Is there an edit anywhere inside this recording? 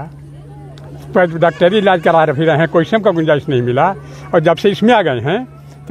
no; 0 cuts

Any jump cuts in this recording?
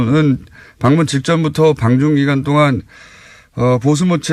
no; 0 cuts

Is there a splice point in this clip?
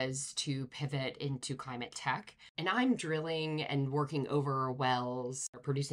yes; 1 cut; at 2.4 s

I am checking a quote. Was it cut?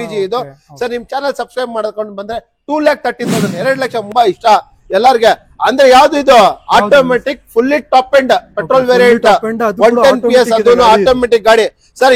yes; 1 cut; at 4.1 s

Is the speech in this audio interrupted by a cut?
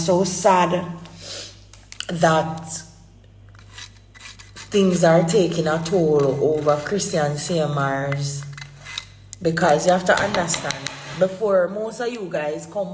no; 0 cuts

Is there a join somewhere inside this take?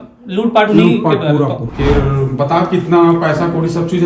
yes; 1 cut; at 1.6 s

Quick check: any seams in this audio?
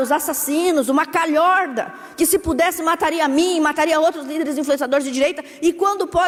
no; 0 cuts

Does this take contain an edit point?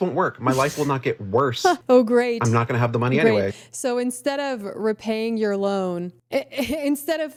no; 0 cuts

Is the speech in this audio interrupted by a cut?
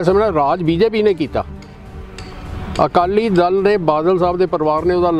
no; 0 cuts

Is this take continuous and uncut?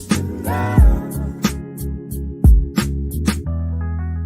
no; 1 cut; at 2.8 s

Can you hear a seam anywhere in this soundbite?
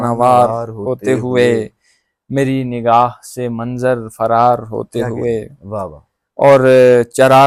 no; 0 cuts

